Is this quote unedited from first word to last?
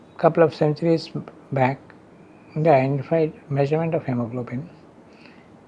yes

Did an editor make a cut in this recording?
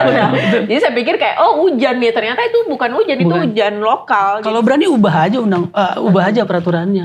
yes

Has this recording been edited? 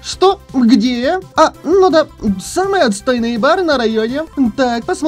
yes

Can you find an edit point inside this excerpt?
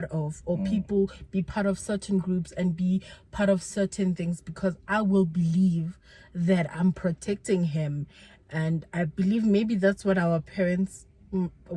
no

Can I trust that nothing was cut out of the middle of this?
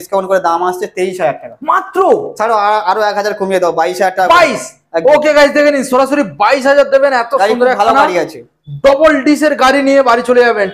yes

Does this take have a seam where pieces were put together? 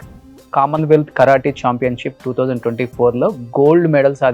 no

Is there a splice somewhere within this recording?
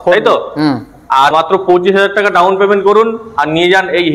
yes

